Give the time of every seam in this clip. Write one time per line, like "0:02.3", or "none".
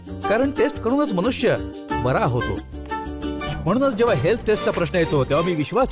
none